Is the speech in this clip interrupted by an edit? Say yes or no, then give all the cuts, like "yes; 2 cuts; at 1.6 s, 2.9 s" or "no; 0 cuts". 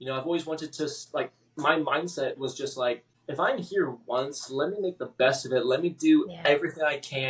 yes; 1 cut; at 3.1 s